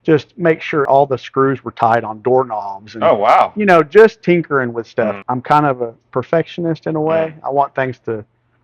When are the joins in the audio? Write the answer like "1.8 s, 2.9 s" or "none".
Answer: 0.9 s, 5.2 s

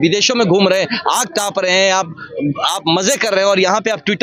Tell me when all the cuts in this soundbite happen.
none

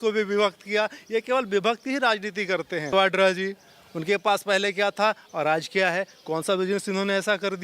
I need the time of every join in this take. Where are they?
2.9 s

